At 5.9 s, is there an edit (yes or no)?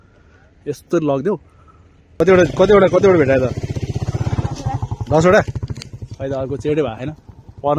no